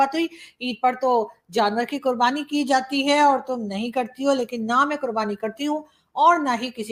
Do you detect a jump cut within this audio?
no; 0 cuts

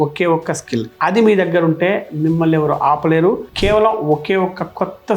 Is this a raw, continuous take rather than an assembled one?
no; 1 cut; at 3.5 s

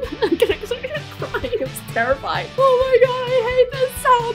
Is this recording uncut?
yes; 0 cuts

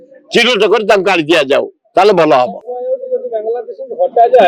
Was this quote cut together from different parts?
no; 0 cuts

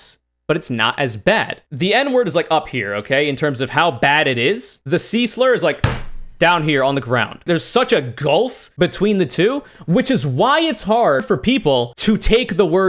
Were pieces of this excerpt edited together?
yes; 1 cut; at 1.6 s

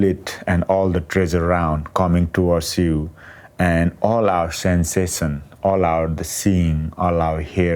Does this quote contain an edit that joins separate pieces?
no; 0 cuts

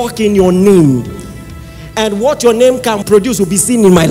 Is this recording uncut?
no; 1 cut; at 3.0 s

